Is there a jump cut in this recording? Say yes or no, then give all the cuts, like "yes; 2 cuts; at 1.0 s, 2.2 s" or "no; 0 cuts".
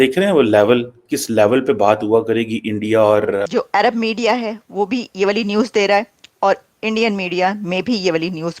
yes; 1 cut; at 3.5 s